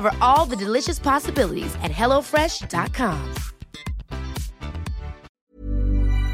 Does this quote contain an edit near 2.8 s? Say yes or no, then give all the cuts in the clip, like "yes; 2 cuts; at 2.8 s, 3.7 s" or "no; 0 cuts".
no; 1 cut; at 5.2 s